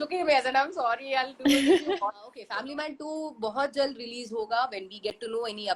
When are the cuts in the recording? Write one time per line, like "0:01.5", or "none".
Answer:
0:02.4